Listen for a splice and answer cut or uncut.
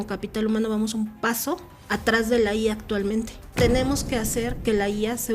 cut